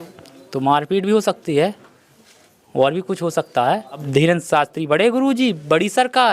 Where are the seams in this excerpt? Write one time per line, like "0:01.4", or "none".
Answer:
0:04.0